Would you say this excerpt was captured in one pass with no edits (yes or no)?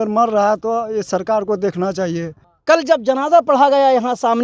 no